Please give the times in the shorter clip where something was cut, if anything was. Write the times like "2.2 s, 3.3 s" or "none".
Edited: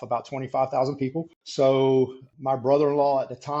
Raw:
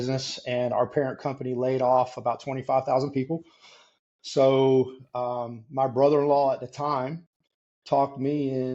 1.4 s, 2.3 s